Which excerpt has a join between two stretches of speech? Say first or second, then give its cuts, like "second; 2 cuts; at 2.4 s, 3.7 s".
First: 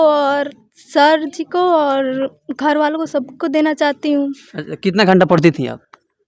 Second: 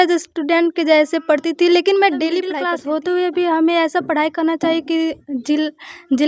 second; 1 cut; at 2.7 s